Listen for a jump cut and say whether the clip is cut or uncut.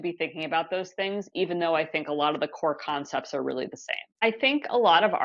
cut